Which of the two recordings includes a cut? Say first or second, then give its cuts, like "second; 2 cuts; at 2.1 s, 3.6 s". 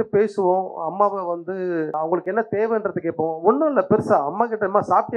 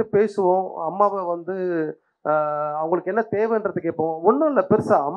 first; 1 cut; at 1.9 s